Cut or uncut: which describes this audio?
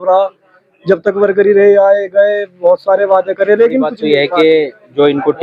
cut